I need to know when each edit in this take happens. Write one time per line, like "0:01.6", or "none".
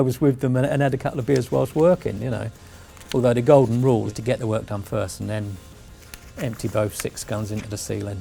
none